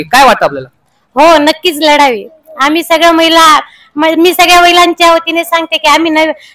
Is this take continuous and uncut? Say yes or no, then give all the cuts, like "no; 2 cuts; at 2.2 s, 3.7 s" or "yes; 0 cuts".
yes; 0 cuts